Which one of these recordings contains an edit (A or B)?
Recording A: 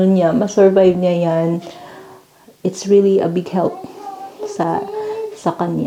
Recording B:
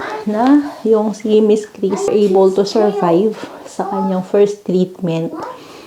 B